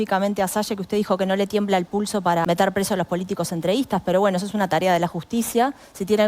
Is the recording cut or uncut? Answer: cut